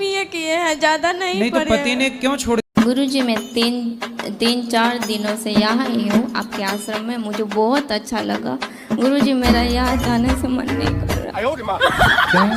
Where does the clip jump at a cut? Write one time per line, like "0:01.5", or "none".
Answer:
0:02.7

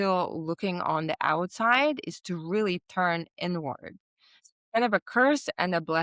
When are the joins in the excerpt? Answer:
0:04.5

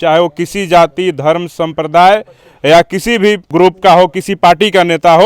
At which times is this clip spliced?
0:03.4

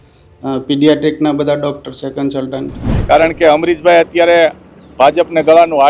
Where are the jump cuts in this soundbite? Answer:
0:02.9

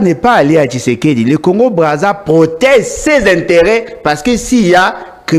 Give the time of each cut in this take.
none

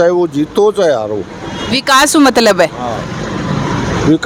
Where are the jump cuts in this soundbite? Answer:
none

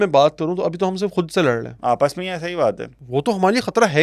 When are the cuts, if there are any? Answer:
0:01.7
0:02.9

